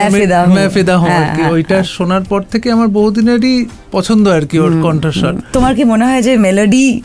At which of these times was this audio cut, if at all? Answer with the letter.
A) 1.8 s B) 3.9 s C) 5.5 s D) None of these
C